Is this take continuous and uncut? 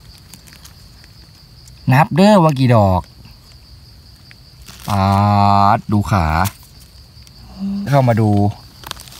no; 1 cut; at 7.9 s

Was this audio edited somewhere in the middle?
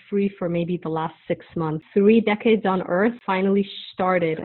yes; 2 cuts; at 1.8 s, 3.2 s

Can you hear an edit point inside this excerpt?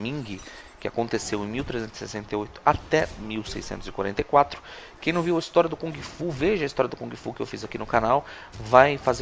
no; 0 cuts

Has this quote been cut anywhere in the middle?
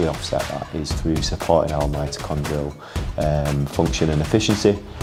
no; 0 cuts

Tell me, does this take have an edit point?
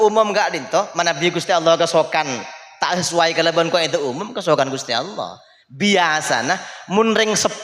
no; 0 cuts

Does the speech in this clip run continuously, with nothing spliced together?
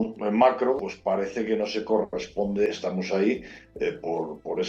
no; 2 cuts; at 0.8 s, 2.7 s

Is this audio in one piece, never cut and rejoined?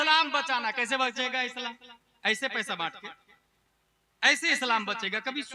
yes; 0 cuts

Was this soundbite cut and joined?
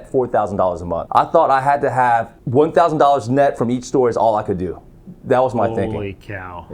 yes; 2 cuts; at 1.0 s, 2.4 s

